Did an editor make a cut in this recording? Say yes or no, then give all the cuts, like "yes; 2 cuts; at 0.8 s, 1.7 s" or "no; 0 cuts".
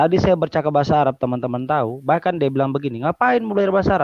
no; 0 cuts